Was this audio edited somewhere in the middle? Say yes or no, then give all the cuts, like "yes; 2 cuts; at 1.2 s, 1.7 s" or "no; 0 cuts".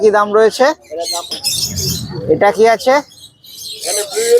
yes; 1 cut; at 1.3 s